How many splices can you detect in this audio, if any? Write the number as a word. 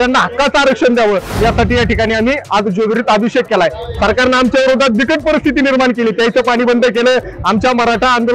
zero